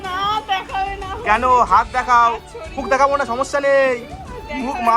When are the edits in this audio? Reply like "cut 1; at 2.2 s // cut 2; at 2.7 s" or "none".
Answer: cut 1; at 2.7 s